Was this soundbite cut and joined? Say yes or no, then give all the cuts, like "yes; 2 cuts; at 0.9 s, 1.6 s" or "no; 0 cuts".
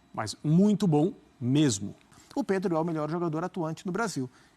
yes; 1 cut; at 2.2 s